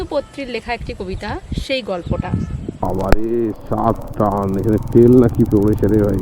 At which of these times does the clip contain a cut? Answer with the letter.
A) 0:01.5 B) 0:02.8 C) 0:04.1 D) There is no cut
B